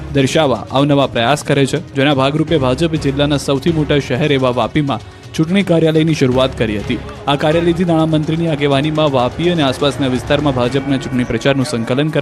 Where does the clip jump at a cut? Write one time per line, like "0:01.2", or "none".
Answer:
0:06.3